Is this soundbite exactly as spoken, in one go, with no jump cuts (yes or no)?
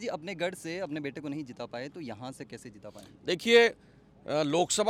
yes